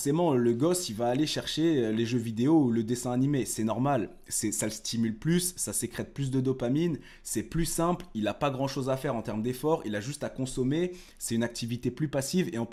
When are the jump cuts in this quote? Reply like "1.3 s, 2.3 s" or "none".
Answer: none